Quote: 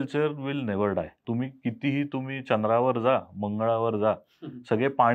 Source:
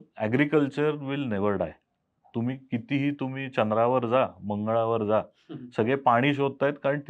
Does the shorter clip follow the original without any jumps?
no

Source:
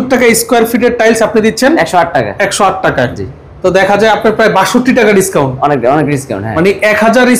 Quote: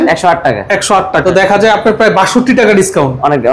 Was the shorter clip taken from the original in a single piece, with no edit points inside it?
no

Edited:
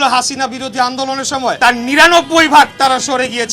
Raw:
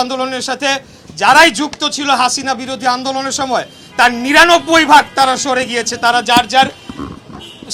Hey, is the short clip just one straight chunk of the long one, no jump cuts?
no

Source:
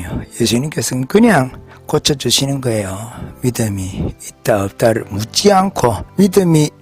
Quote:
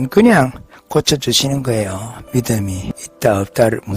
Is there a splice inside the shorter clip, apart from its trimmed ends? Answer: yes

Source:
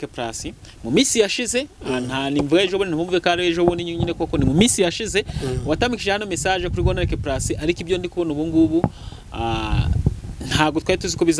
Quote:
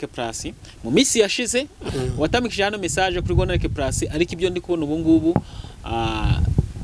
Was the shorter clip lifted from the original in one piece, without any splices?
no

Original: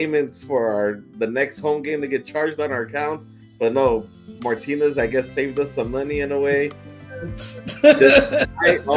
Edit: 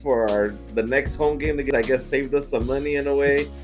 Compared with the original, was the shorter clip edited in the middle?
yes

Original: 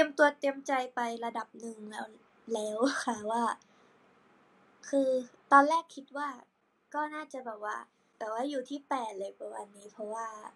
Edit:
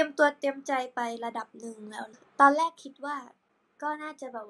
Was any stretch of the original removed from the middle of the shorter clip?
yes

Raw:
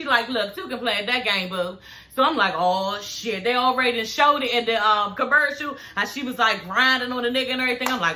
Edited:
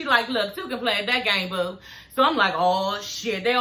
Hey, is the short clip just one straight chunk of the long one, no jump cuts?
yes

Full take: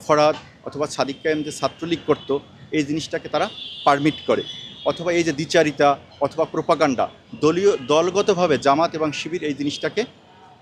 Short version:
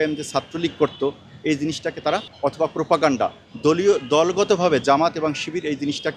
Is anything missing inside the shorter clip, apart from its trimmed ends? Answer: yes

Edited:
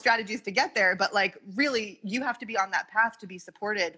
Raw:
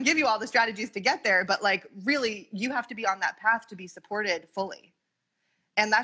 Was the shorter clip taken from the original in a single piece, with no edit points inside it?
yes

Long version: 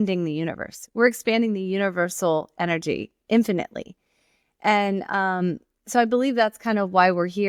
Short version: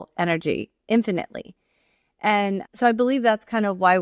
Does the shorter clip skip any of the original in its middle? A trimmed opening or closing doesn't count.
yes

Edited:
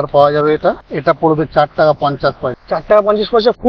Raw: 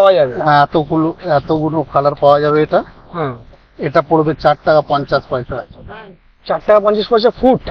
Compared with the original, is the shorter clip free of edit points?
no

